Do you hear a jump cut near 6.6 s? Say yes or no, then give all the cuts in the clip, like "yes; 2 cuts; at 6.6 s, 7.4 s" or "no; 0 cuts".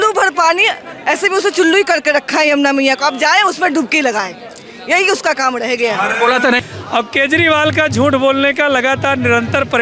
yes; 1 cut; at 6.6 s